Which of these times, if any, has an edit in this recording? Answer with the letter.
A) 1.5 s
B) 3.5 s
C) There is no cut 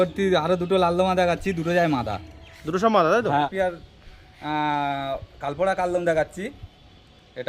B